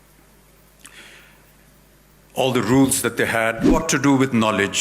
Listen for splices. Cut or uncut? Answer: cut